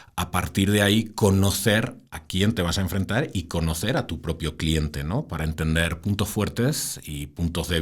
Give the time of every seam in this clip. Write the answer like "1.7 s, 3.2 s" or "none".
none